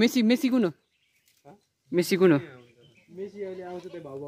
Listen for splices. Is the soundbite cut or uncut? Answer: uncut